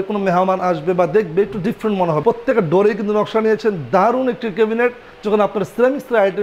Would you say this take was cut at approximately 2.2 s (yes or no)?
yes